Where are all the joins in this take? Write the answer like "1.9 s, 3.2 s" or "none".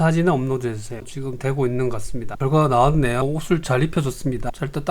1.1 s, 2.2 s